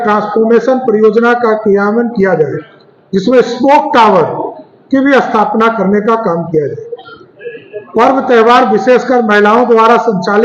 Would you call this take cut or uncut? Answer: uncut